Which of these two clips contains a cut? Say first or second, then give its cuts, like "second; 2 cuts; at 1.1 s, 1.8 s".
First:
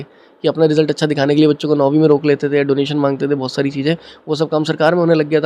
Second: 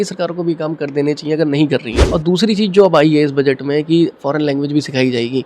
second; 1 cut; at 2.0 s